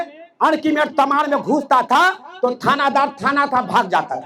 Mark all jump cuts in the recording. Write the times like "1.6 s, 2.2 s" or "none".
none